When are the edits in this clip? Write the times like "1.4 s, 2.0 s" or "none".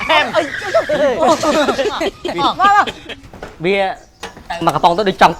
none